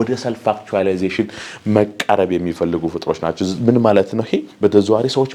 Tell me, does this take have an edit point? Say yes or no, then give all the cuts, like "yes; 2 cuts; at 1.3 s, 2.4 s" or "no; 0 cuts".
no; 0 cuts